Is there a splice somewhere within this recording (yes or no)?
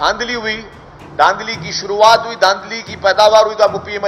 no